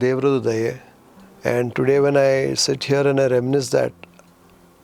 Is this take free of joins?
yes; 0 cuts

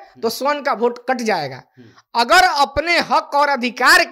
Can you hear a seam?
no; 0 cuts

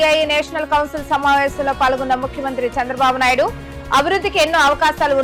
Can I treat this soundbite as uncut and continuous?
yes; 0 cuts

